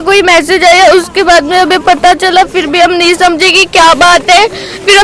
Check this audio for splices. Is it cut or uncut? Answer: uncut